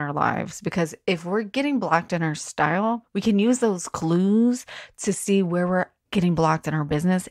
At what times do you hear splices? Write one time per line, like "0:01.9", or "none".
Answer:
0:03.1
0:06.0